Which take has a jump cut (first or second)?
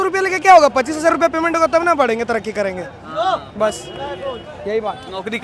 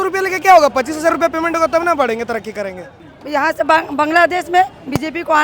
second